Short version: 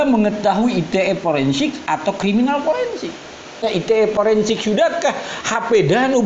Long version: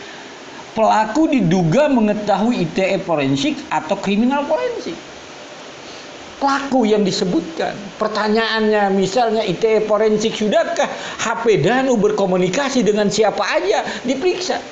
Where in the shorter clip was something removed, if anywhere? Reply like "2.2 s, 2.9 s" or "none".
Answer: 3.8 s